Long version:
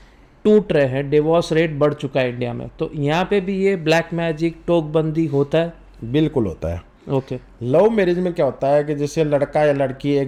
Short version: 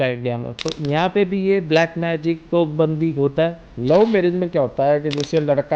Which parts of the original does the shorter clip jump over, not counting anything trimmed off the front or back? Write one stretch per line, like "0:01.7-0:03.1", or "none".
0:05.8-0:07.5

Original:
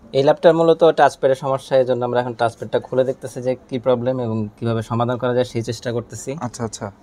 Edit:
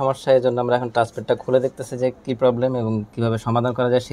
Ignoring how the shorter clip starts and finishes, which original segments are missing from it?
none

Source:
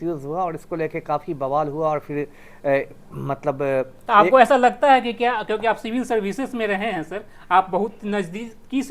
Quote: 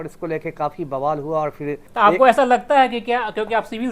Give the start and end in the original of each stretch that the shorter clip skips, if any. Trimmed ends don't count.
0:02.3-0:04.0

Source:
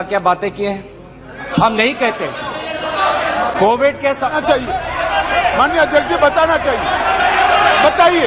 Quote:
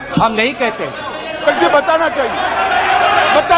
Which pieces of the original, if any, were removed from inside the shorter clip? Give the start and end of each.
0:02.8-0:05.9

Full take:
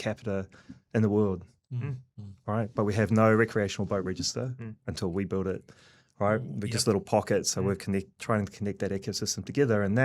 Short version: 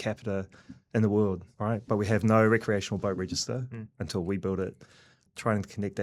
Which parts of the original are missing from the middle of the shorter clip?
0:01.5-0:02.4
0:06.1-0:08.1

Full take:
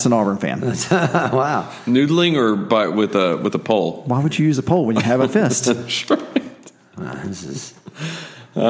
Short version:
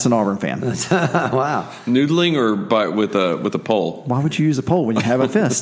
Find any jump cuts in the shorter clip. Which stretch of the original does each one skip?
none

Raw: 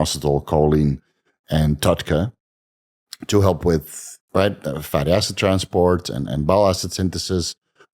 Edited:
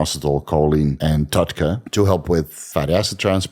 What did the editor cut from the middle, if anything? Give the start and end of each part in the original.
0:01.0-0:01.5
0:02.3-0:03.2
0:04.0-0:04.8

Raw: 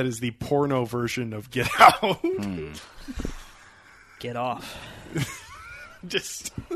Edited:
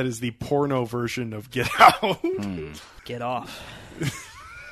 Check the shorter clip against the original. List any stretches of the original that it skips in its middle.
0:02.9-0:04.0

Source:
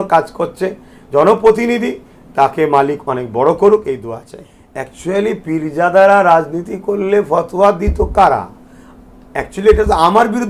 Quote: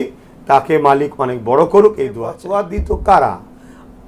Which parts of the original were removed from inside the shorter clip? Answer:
0:04.3-0:07.5

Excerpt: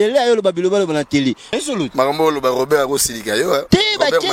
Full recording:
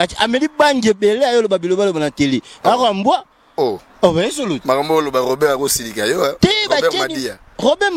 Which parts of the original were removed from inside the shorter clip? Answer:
0:02.6-0:04.2

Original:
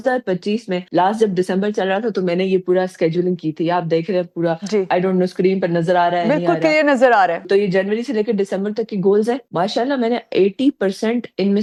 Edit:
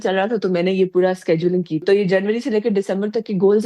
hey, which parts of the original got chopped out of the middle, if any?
0:03.5-0:07.4

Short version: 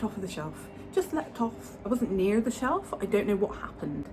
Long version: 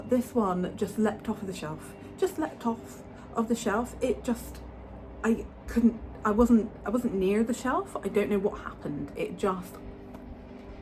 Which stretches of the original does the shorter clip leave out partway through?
0:03.0-0:06.8

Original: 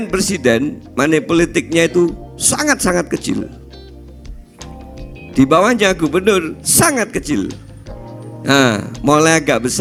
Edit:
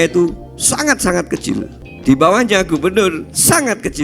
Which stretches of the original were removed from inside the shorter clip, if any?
0:03.6-0:05.1

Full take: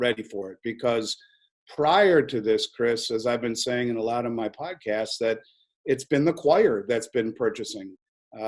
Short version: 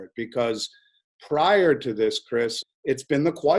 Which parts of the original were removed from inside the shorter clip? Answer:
0:03.1-0:05.6

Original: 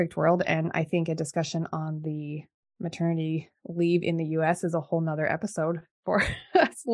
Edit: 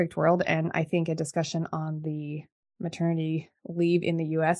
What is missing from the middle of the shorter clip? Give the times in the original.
none

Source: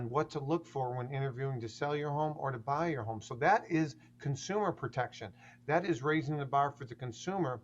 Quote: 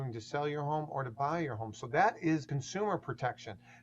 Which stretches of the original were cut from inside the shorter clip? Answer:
0:04.0-0:04.3

